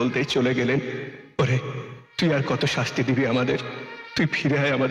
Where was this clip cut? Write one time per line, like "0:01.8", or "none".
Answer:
none